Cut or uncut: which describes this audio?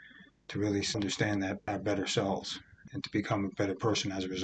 cut